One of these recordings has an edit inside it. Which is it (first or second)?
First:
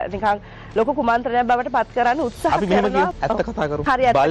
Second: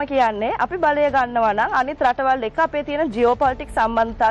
first